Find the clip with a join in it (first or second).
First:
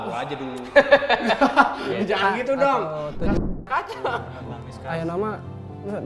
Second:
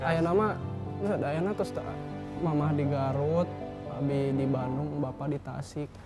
first